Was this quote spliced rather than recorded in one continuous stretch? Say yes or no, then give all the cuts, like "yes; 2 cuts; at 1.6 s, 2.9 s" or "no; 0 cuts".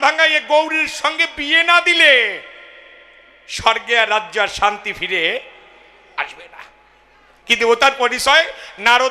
no; 0 cuts